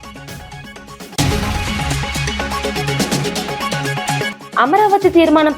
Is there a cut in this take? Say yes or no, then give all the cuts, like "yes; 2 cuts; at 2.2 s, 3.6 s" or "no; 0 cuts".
yes; 2 cuts; at 1.0 s, 4.3 s